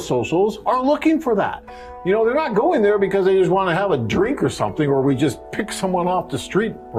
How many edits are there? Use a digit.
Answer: 0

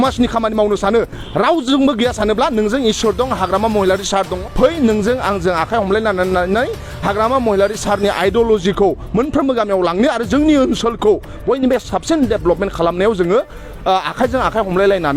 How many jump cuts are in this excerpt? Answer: 1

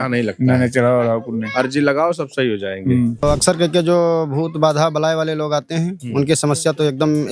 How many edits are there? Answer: 1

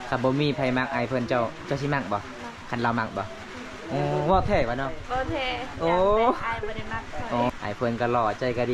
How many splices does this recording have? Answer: 1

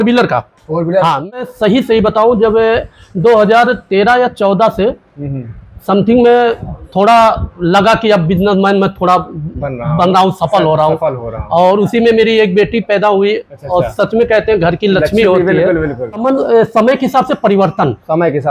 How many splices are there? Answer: 2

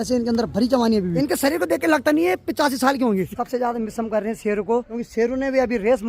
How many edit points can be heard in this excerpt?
3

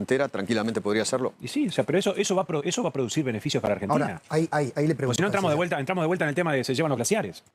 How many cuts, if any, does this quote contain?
1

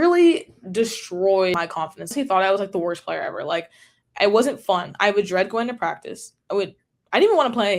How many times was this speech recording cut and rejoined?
1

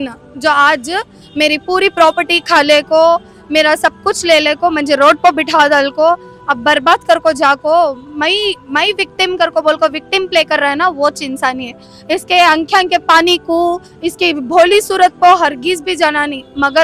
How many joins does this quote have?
0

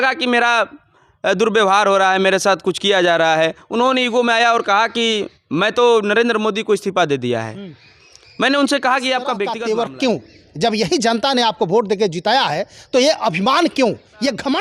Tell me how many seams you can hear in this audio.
1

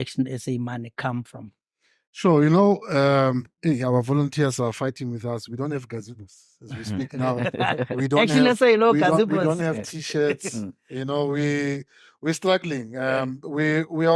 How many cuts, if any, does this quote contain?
0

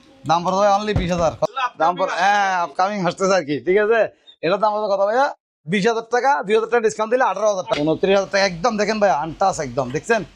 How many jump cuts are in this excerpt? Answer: 2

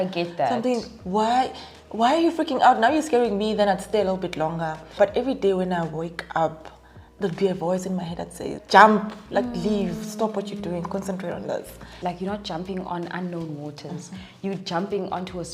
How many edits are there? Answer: 3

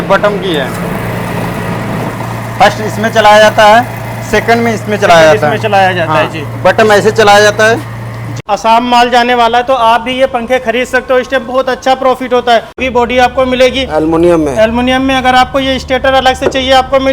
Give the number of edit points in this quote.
2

